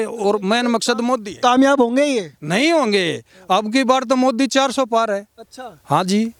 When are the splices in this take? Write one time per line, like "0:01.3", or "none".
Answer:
none